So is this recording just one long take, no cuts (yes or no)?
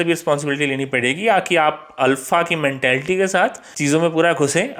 yes